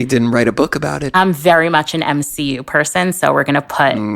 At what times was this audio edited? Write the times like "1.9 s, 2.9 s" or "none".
1.0 s

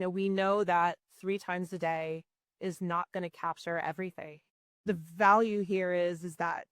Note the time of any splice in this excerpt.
4.9 s

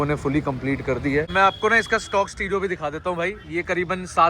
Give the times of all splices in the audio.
1.3 s

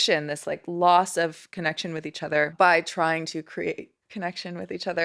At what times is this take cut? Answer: 2.5 s

